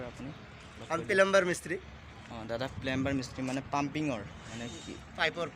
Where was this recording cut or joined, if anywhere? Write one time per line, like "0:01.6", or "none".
none